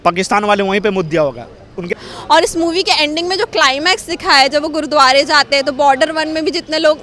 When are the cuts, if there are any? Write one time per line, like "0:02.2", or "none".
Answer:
0:01.9